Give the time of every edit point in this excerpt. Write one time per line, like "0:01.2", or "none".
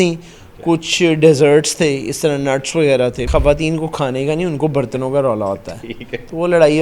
0:03.2